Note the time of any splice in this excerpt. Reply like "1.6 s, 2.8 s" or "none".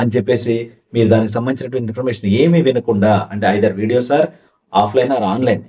none